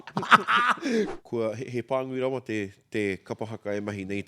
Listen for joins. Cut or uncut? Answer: cut